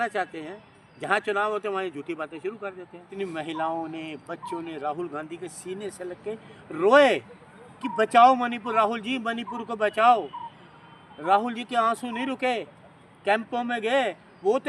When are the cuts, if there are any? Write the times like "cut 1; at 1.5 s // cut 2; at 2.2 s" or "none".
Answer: cut 1; at 3.1 s